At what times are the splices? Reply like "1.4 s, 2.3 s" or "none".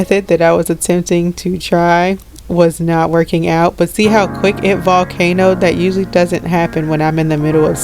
none